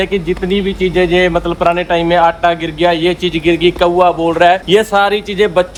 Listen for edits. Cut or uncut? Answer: uncut